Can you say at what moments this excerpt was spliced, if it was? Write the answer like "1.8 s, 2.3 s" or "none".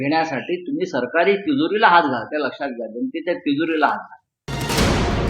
4.4 s